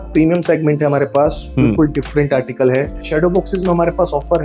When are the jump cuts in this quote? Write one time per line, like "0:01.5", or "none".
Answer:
0:03.0